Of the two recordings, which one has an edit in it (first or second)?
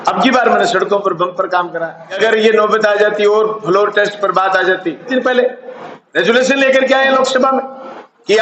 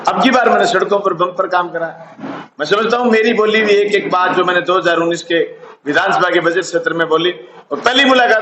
first